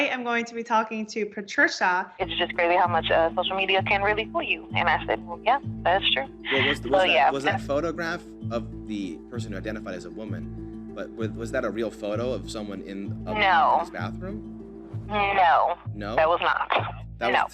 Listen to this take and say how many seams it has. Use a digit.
1